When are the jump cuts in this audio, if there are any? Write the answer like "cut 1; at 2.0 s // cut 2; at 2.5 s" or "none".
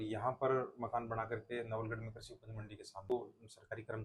cut 1; at 3.1 s